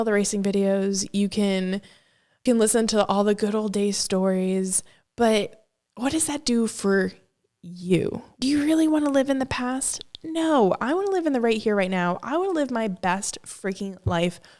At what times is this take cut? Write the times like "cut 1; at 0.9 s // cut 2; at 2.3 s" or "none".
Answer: cut 1; at 2.4 s // cut 2; at 8.4 s

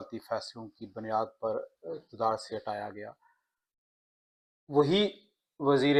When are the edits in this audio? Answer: none

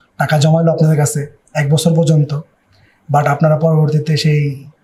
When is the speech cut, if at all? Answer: none

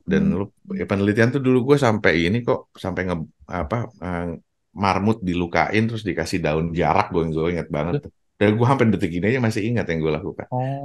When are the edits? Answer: none

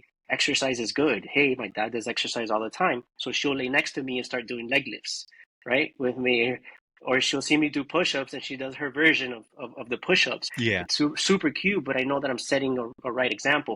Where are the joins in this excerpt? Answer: cut 1; at 10.5 s

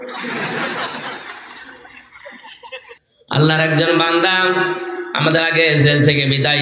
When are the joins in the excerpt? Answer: cut 1; at 3.1 s

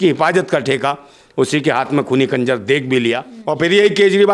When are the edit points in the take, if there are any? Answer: cut 1; at 3.3 s

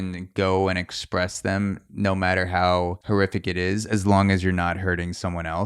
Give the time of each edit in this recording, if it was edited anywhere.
cut 1; at 3.0 s

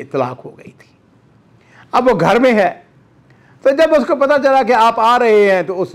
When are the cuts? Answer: none

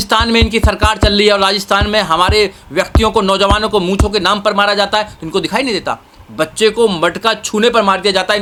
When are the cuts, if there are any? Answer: none

